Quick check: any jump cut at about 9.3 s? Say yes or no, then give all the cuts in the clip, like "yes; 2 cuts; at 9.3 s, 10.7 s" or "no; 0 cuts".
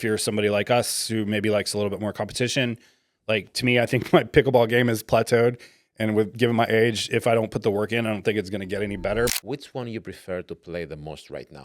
yes; 1 cut; at 9.3 s